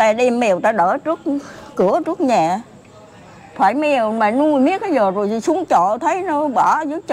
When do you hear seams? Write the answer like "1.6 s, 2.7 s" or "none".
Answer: none